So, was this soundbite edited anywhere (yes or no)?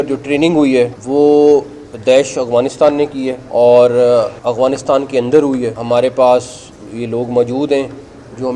yes